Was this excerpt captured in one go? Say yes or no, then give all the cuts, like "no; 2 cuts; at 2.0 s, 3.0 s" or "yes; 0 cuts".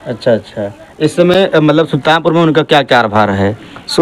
yes; 0 cuts